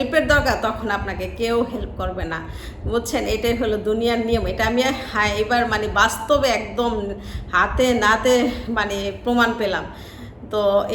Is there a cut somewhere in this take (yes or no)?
no